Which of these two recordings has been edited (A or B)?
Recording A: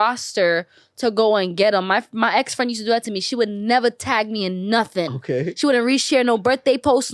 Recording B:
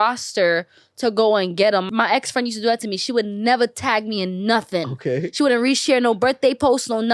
B